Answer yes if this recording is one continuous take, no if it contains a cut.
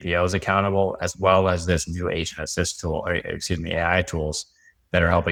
yes